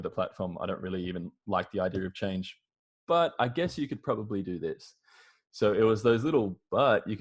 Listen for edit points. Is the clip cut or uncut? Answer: uncut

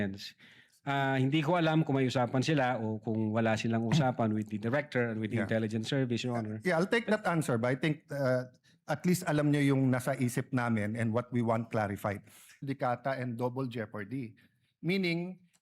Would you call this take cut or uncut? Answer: cut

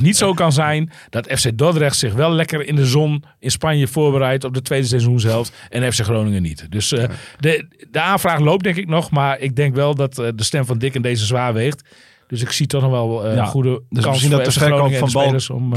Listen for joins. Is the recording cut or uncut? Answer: uncut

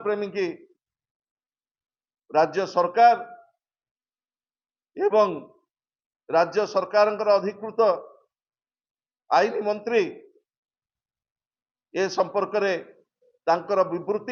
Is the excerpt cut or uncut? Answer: uncut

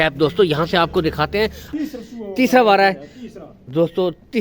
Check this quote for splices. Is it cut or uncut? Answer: cut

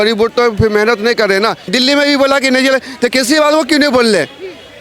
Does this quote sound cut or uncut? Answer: cut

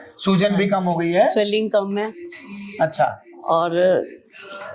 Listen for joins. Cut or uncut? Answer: uncut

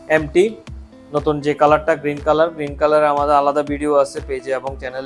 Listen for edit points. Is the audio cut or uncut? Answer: uncut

